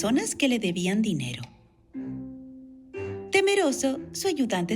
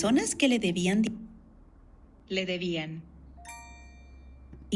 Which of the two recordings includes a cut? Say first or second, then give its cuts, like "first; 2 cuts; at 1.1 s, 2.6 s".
first; 1 cut; at 1.1 s